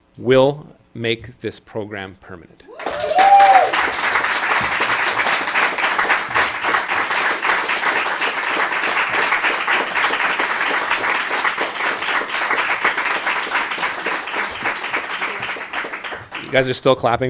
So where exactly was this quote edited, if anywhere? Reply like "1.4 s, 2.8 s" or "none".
none